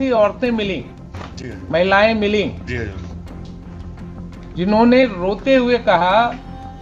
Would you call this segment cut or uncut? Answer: uncut